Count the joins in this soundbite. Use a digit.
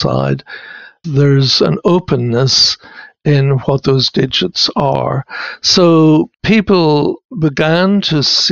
2